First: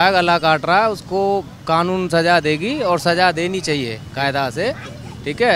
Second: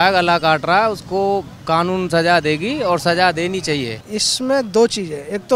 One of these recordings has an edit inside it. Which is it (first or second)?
second